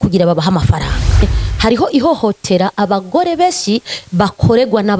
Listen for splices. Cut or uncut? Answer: cut